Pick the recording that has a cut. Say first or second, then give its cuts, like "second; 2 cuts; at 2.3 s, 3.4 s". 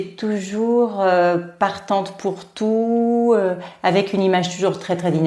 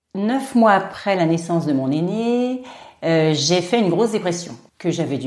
second; 1 cut; at 0.9 s